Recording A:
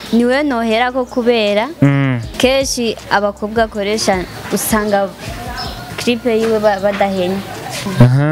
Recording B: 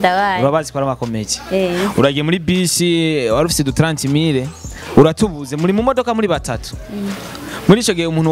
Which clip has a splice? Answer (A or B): A